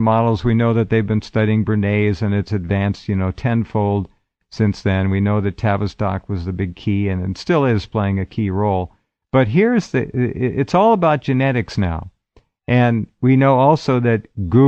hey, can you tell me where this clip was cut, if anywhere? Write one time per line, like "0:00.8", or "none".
0:03.2

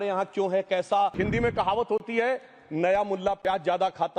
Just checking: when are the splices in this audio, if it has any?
0:01.2

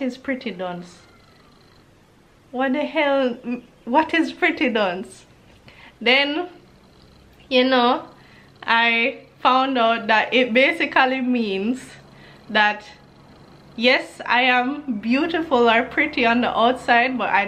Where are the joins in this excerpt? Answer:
none

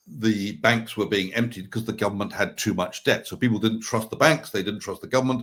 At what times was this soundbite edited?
none

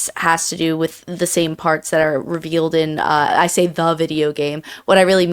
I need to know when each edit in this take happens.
0:03.3

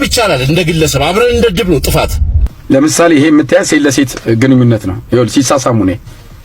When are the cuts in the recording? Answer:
0:02.5

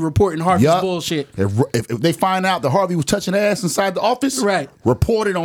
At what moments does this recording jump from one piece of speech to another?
none

